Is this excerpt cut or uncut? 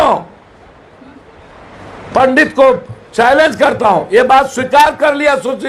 uncut